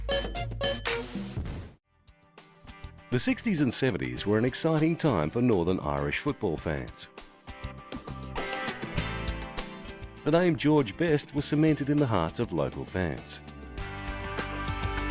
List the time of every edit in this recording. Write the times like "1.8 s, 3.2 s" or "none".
6.4 s